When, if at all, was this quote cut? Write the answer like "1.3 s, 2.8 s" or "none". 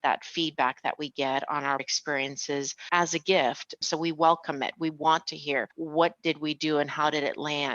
1.9 s, 3.7 s, 5.8 s